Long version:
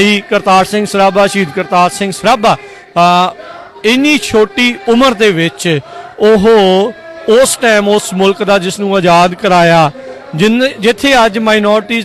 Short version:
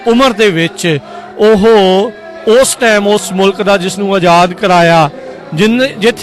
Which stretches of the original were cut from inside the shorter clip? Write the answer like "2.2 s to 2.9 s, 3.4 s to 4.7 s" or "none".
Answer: none